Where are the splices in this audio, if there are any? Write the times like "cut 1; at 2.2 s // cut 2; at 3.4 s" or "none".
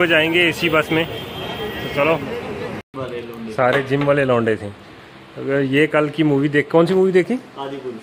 cut 1; at 2.8 s